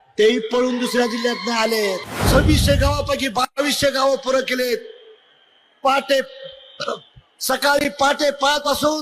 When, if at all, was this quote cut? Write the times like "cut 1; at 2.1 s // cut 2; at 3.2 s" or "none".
cut 1; at 2.2 s